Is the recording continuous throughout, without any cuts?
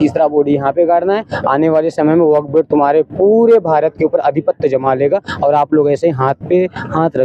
yes; 0 cuts

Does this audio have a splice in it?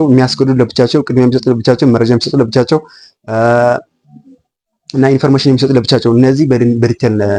no; 0 cuts

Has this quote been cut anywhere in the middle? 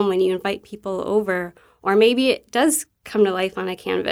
no; 0 cuts

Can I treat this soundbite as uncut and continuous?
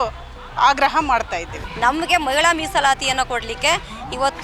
no; 1 cut; at 1.6 s

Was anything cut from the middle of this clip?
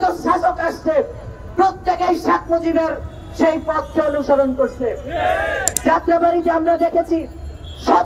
yes; 1 cut; at 5.7 s

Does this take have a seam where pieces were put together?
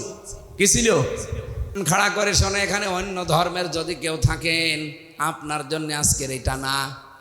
yes; 1 cut; at 1.8 s

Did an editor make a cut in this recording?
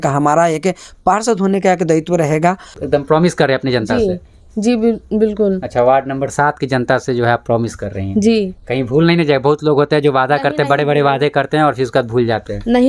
yes; 1 cut; at 2.7 s

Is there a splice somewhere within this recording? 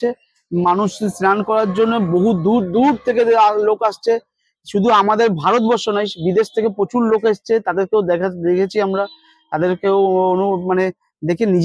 no; 0 cuts

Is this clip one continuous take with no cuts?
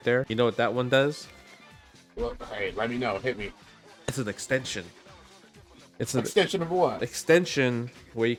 yes; 0 cuts

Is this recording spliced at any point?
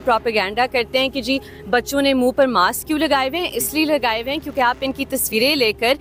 no; 0 cuts

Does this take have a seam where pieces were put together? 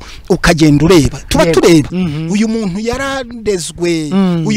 yes; 1 cut; at 1.9 s

